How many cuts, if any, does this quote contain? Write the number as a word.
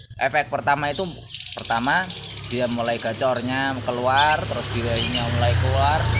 zero